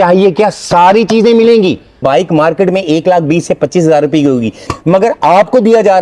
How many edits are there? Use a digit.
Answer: 2